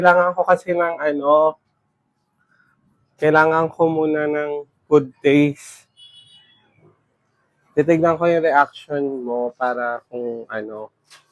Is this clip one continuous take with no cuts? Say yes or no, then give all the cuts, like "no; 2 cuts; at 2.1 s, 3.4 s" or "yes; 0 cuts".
yes; 0 cuts